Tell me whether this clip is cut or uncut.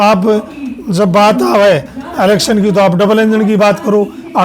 uncut